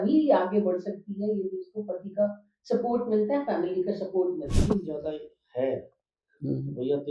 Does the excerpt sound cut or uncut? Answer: cut